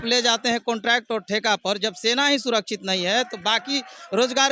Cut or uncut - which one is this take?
uncut